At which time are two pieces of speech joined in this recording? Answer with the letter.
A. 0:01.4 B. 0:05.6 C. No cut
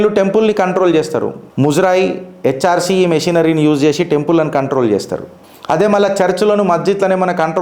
A